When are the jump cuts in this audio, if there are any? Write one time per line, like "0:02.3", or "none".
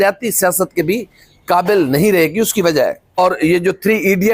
0:03.2